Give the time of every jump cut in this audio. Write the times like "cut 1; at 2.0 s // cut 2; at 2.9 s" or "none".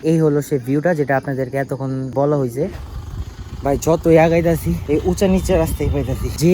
cut 1; at 2.7 s